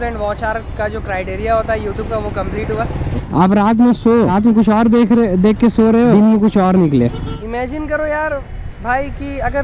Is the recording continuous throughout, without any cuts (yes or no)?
no